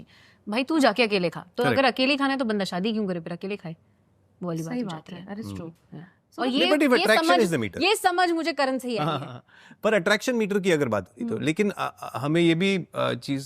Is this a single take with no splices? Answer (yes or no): yes